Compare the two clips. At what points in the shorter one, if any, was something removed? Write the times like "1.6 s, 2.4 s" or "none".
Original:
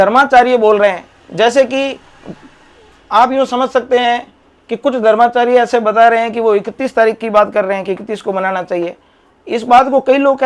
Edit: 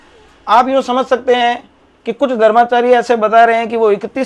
none

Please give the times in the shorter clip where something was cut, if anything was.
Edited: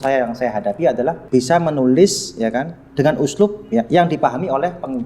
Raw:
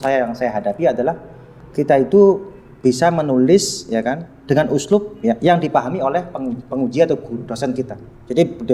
1.2 s

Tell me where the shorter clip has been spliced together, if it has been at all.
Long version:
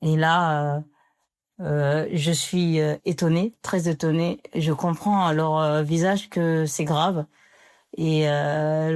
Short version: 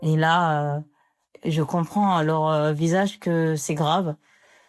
1.4 s

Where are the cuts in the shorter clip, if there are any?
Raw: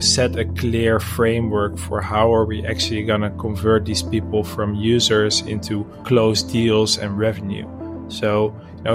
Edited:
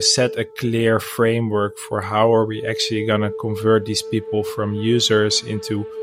none

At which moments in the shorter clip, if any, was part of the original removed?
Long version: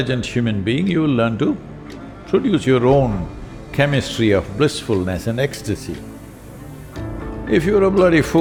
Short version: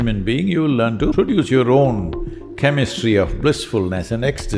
1.1 s

